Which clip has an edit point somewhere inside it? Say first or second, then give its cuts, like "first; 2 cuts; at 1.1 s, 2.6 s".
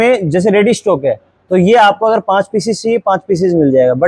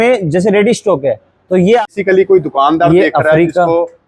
second; 1 cut; at 1.8 s